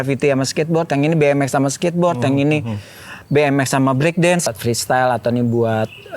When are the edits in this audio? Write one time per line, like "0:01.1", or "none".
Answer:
0:04.5